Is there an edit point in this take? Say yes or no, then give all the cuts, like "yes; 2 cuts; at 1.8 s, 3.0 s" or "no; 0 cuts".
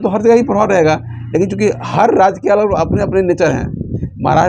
no; 0 cuts